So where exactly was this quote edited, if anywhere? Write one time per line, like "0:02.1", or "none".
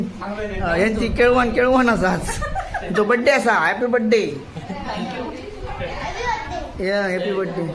none

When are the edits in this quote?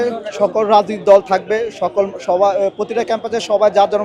none

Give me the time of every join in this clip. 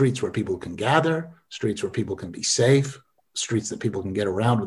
none

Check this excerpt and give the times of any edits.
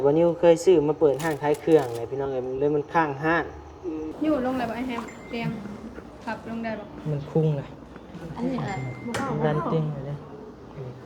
0:04.1

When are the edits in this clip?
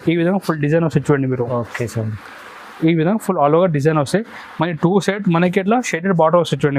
none

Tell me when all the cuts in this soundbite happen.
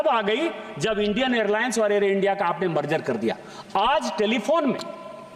none

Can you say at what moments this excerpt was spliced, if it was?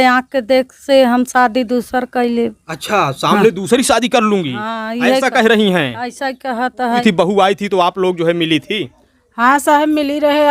0:07.0

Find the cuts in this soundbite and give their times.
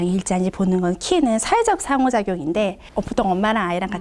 0:02.8

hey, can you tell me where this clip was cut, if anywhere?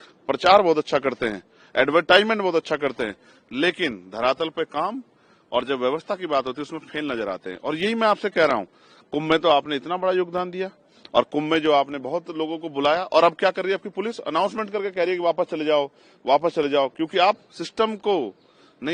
none

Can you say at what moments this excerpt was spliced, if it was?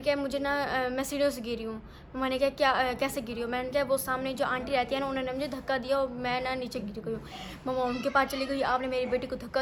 none

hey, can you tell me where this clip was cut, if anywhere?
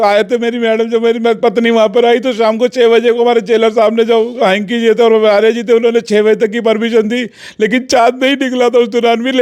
none

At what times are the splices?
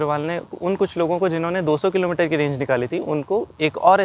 none

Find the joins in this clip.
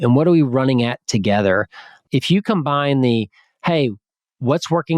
0:02.0

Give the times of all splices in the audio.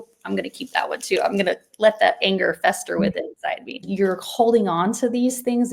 0:03.9

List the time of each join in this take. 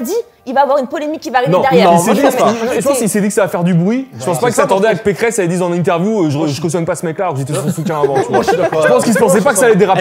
none

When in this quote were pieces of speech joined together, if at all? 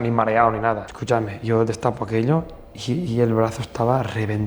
0:00.9

